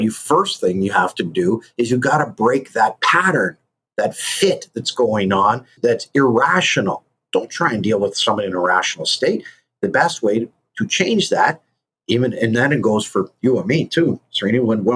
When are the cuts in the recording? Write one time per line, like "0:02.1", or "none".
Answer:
0:05.7
0:07.2